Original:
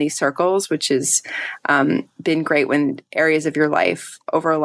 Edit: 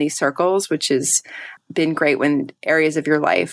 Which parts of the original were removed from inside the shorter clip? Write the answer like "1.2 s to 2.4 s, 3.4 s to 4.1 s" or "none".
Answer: 1.6 s to 2.1 s